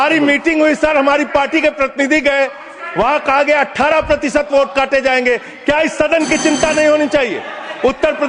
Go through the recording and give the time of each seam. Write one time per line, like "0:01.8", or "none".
none